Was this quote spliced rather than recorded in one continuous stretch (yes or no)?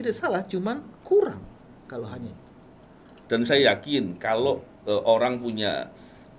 yes